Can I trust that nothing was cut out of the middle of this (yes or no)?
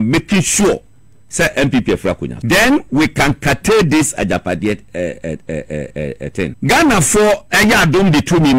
no